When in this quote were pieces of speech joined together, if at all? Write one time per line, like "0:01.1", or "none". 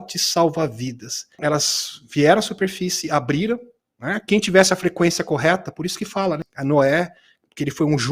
0:01.4
0:06.5